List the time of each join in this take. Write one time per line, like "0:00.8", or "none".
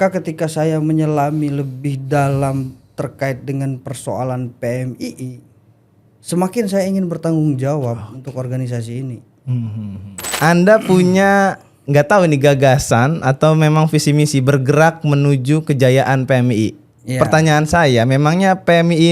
0:10.3